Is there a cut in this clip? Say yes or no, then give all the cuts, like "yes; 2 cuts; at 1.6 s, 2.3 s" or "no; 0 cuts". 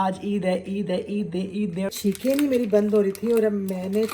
yes; 1 cut; at 1.7 s